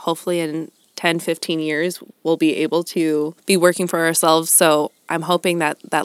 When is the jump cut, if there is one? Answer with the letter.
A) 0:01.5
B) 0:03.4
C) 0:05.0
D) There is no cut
B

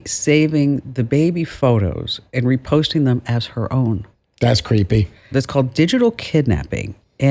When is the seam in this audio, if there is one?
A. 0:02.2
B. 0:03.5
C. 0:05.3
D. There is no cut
C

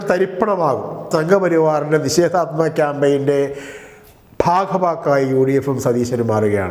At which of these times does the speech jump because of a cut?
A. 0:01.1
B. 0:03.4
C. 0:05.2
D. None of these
A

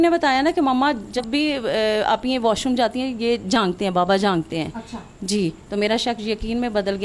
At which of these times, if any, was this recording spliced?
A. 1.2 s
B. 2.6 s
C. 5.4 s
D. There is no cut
A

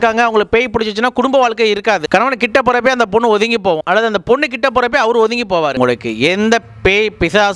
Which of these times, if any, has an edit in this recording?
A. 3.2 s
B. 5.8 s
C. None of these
B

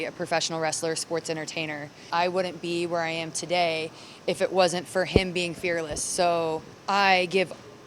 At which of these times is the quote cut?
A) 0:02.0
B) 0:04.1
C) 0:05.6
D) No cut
A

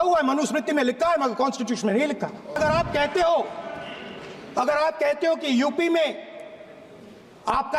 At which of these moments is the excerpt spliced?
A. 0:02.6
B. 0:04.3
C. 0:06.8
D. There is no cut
A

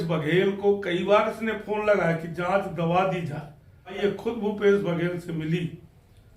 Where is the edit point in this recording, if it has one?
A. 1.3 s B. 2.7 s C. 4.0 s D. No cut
C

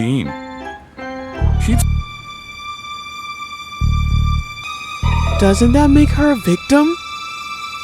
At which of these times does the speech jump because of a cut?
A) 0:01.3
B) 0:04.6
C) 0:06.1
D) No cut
B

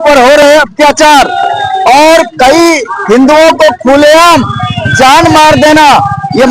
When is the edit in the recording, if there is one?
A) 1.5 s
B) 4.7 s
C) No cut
C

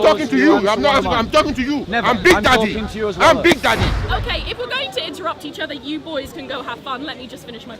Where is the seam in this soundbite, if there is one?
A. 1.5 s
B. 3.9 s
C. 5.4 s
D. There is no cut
B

